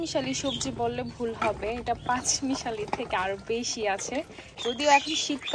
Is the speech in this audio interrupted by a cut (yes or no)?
yes